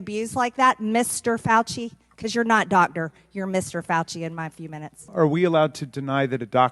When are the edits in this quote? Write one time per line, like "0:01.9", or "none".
0:05.1